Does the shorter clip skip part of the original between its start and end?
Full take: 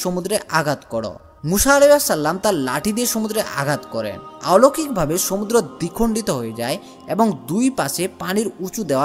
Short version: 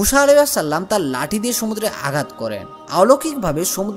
no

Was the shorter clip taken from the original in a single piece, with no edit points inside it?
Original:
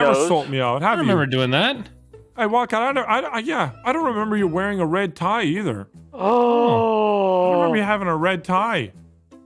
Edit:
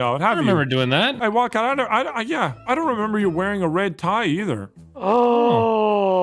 no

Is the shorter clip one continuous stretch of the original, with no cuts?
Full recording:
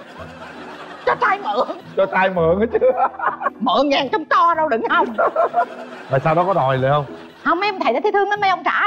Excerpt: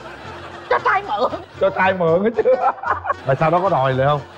no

